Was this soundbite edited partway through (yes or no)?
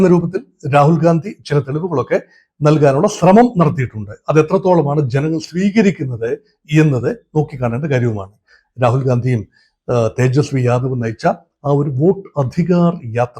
yes